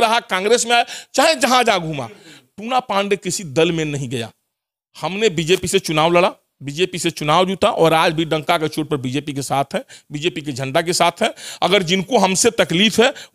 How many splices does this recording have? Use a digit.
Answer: 0